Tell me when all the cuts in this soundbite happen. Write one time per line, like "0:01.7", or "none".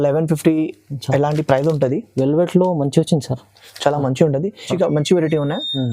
0:04.7